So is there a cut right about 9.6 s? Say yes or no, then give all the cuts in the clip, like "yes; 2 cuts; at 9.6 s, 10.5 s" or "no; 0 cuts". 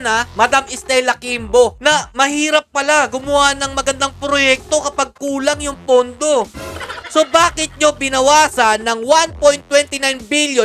no; 0 cuts